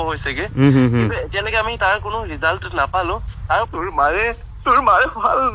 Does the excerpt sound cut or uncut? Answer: cut